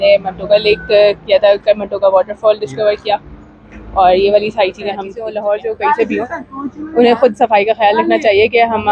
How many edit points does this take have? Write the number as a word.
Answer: one